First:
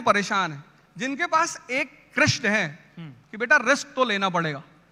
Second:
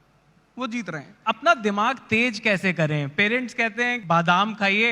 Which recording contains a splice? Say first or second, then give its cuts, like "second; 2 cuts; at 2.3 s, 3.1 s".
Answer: second; 2 cuts; at 1.1 s, 4.0 s